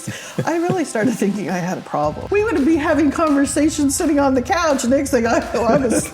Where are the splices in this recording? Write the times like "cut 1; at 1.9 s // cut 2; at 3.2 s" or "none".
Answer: cut 1; at 2.2 s